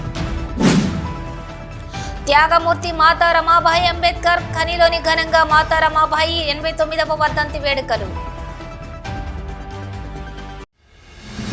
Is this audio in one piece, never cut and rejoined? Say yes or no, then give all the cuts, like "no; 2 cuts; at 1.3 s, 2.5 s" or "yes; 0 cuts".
yes; 0 cuts